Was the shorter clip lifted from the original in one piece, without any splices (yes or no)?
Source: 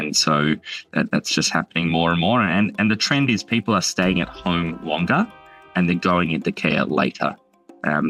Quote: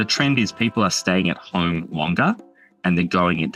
yes